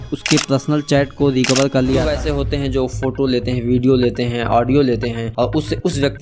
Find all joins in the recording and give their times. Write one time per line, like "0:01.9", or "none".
0:02.1